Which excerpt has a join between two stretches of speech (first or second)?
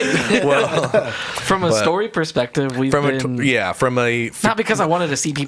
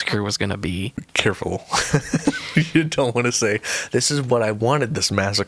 second